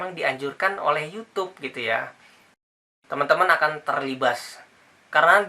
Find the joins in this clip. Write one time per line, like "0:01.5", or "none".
0:02.7